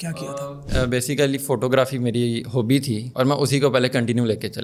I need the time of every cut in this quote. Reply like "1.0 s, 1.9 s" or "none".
none

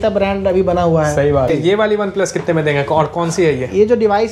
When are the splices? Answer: 1.5 s

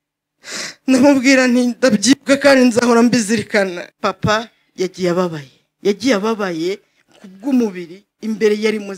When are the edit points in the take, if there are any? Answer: 3.9 s

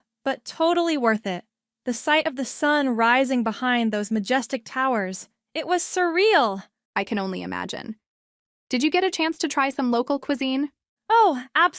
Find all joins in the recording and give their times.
6.8 s, 10.9 s

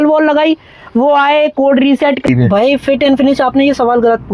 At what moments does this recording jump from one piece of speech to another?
2.2 s

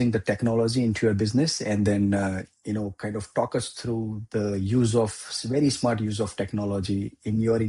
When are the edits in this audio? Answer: none

